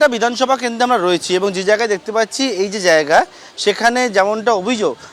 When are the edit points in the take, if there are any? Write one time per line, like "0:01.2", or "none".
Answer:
none

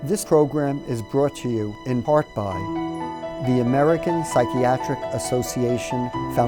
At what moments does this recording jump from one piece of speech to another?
none

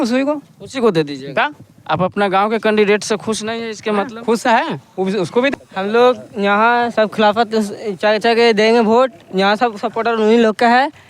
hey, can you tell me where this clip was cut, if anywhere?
0:05.5

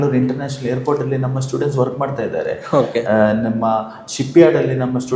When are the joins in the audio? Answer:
none

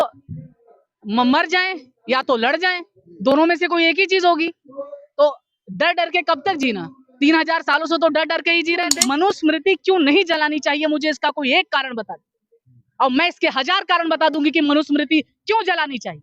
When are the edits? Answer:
0:09.0

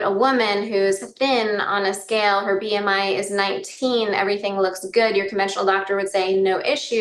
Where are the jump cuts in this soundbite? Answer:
none

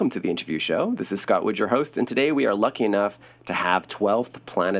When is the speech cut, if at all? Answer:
none

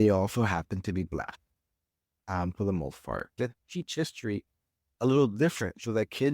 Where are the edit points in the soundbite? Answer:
0:03.3

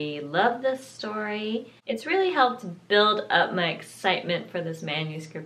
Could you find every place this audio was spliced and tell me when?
0:01.8

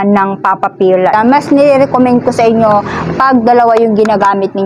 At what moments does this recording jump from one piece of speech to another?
0:01.1

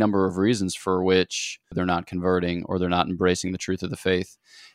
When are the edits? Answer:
0:01.8

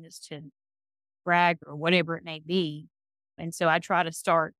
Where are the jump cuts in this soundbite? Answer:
none

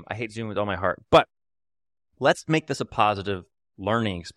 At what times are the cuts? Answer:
none

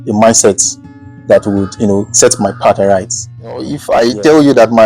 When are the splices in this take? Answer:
0:03.8

